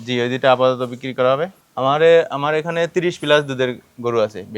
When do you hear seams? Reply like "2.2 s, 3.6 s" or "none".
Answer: 1.6 s

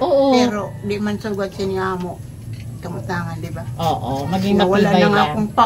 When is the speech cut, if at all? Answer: none

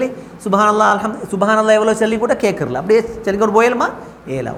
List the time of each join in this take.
none

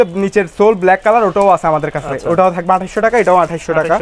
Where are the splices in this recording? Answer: none

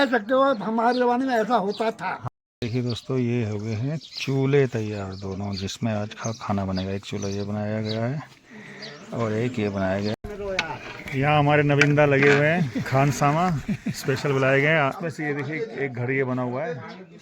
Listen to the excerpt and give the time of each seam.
2.2 s, 10.2 s, 15.0 s

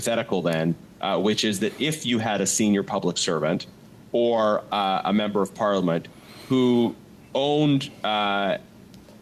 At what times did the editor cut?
none

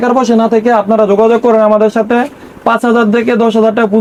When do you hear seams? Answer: none

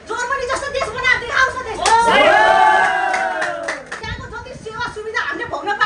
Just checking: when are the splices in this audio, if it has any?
4.0 s

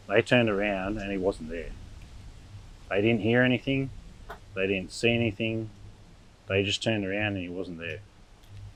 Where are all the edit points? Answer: none

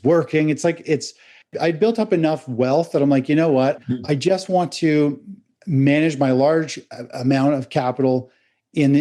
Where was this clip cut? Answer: 1.5 s, 3.8 s

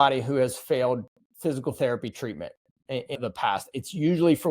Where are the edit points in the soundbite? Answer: 3.2 s

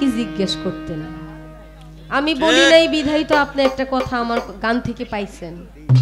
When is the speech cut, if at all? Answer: none

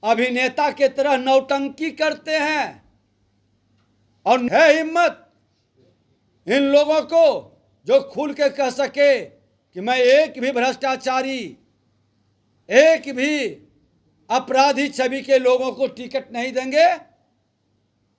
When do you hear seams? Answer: 4.5 s

